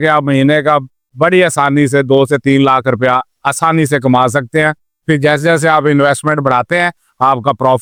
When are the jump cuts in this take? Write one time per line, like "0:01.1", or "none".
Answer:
none

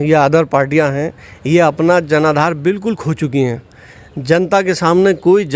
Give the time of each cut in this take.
none

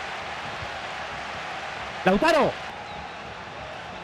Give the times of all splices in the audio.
0:02.7

